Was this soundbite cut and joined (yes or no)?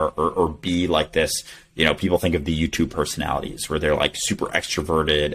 no